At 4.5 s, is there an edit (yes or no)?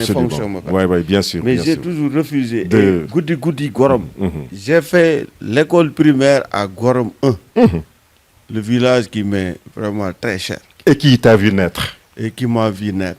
yes